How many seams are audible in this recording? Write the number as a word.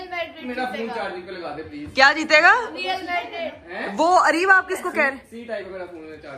zero